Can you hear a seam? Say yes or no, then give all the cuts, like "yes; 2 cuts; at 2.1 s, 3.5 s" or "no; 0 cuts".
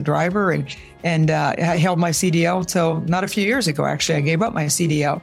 no; 0 cuts